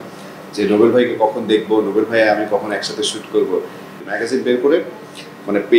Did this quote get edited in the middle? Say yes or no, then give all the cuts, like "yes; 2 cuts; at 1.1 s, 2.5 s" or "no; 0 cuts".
yes; 1 cut; at 3.9 s